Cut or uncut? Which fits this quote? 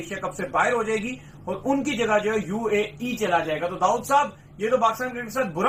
uncut